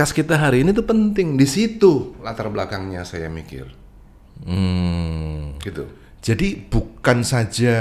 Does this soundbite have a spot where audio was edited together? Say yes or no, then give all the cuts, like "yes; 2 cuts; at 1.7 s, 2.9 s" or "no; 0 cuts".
no; 0 cuts